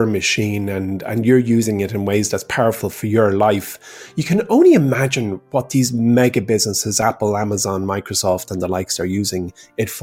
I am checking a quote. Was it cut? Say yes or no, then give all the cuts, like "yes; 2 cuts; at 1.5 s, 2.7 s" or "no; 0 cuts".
no; 0 cuts